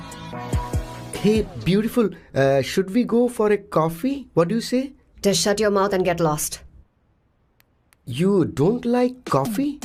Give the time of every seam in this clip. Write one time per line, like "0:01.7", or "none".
none